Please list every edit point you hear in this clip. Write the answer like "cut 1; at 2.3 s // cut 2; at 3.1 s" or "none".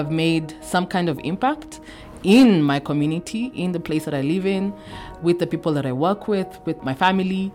none